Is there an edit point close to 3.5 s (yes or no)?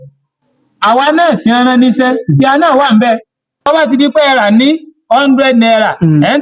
yes